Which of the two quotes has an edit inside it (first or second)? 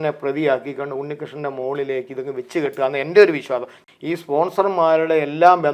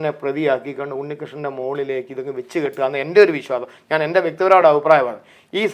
first